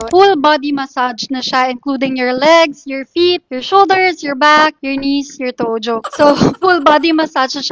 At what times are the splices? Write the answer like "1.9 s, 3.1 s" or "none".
none